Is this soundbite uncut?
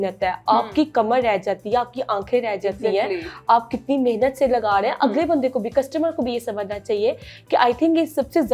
yes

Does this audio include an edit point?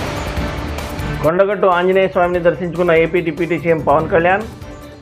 yes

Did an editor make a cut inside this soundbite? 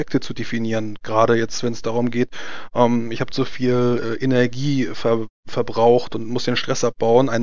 no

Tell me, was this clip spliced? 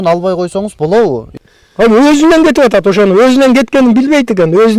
yes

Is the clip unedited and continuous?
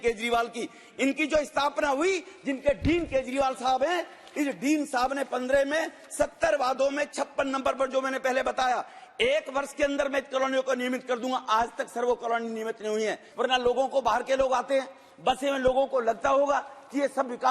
no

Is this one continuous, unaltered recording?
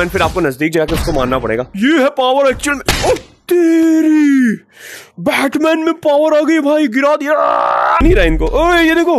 no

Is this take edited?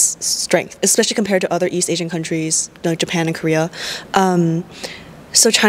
no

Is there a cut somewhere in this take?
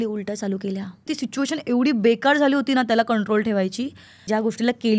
yes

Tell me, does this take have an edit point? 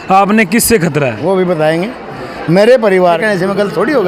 yes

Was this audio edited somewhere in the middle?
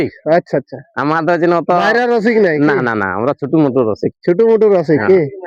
no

